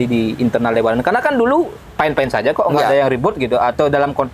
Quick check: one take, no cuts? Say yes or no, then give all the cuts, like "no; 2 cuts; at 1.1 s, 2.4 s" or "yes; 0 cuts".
yes; 0 cuts